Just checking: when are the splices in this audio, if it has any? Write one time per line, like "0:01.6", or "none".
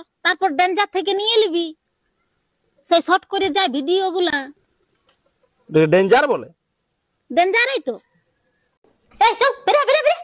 0:09.0